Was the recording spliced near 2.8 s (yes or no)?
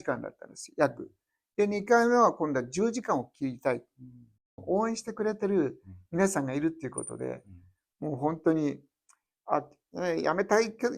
no